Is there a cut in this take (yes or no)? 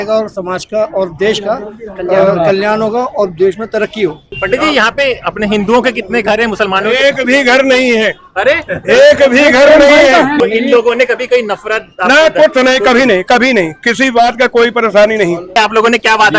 yes